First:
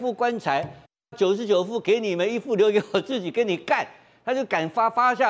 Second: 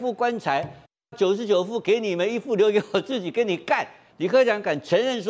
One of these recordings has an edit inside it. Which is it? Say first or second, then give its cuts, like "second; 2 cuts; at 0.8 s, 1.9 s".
second; 1 cut; at 4.0 s